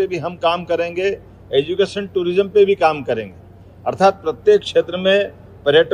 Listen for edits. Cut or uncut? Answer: uncut